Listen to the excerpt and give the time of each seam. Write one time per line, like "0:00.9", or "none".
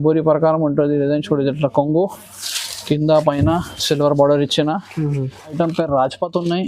0:05.4